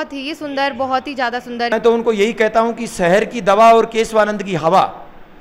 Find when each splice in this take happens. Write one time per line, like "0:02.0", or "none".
0:01.7

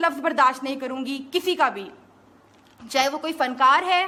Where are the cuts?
none

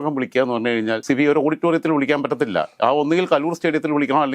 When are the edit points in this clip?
0:01.0

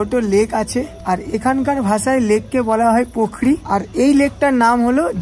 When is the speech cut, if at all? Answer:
0:00.9
0:03.6

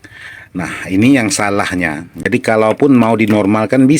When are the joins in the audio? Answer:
0:02.3

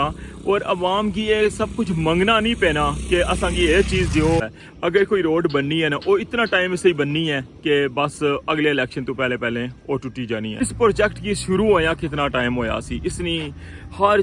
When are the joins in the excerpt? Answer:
0:04.6
0:10.6

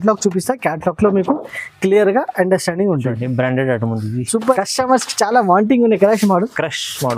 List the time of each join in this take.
0:04.6

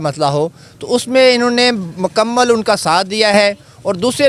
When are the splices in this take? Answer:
none

